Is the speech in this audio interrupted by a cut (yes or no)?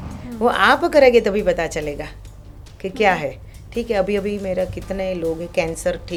no